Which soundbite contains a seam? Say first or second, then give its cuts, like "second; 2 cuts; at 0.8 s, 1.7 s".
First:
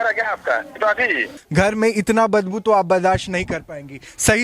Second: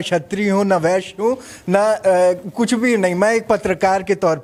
first; 1 cut; at 1.4 s